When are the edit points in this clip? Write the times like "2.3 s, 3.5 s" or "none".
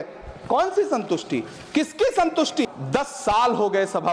2.6 s